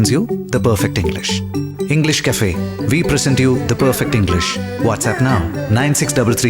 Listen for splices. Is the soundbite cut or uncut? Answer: uncut